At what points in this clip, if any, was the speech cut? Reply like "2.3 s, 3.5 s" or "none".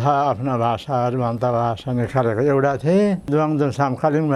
3.3 s